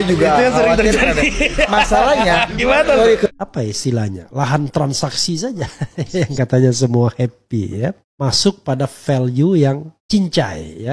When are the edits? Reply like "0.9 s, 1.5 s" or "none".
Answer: 3.4 s, 8.1 s, 9.9 s